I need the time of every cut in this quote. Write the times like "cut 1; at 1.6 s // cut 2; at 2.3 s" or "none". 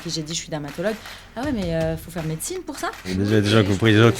cut 1; at 3.1 s